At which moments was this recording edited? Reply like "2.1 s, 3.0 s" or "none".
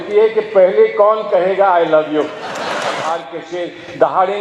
2.9 s